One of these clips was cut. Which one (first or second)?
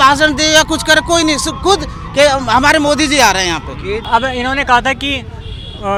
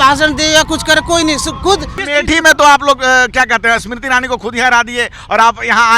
second